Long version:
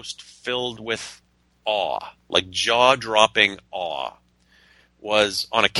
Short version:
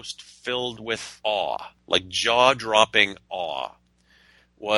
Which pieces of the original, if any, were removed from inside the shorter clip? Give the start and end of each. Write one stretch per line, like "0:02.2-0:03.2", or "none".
0:01.1-0:01.5